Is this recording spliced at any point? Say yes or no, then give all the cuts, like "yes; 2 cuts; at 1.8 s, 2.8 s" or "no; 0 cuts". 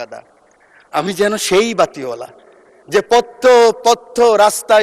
no; 0 cuts